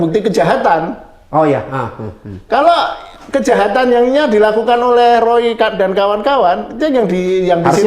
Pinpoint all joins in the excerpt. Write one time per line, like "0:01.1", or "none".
none